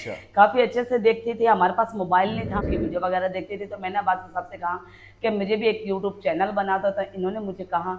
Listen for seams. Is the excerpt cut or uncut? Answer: cut